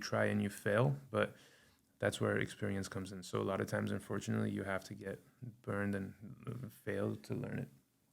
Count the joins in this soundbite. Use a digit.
0